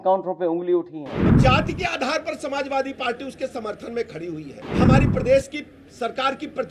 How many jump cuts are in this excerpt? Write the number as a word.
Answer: two